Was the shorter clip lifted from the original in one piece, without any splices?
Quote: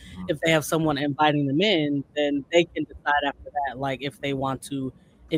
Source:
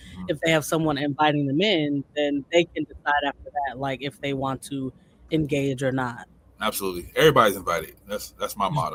yes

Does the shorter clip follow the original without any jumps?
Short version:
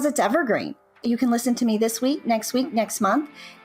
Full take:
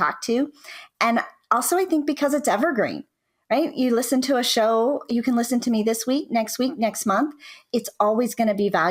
no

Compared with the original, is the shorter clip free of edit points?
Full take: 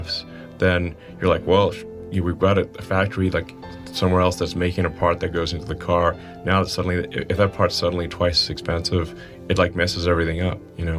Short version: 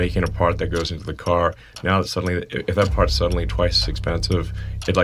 yes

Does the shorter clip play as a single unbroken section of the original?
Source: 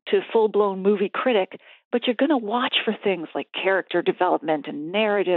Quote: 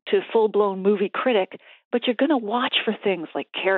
yes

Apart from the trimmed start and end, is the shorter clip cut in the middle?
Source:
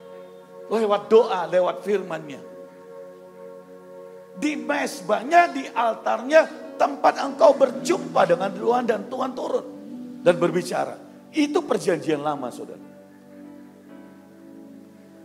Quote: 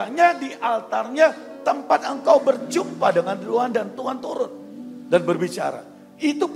no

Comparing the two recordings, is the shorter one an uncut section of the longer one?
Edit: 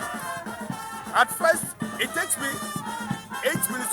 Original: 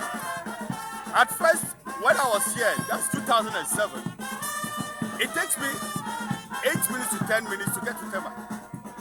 no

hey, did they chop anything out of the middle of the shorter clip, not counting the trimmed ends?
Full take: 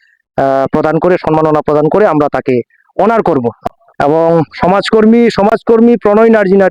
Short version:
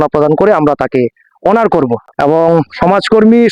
yes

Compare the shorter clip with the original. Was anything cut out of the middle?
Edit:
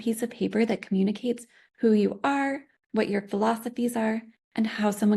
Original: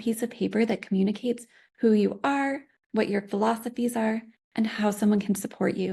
no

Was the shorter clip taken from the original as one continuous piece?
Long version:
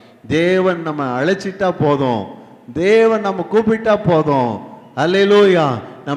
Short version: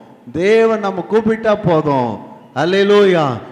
yes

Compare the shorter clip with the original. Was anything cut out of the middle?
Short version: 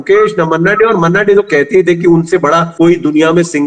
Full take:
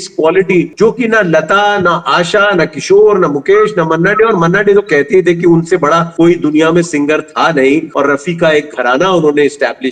no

